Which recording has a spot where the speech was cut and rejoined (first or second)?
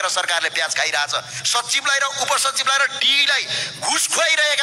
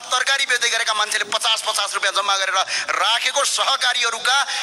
first